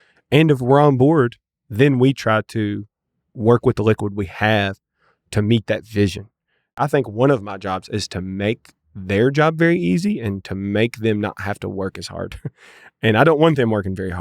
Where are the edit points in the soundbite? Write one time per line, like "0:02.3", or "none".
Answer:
0:06.7